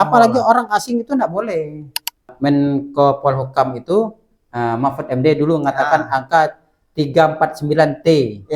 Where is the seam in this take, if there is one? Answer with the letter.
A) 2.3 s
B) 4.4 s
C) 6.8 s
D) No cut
A